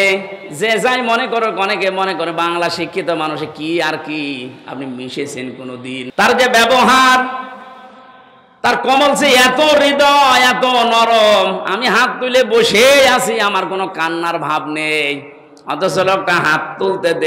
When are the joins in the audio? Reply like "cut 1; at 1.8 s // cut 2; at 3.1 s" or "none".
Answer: cut 1; at 6.1 s